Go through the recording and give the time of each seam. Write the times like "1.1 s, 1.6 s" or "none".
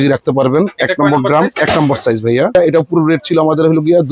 2.5 s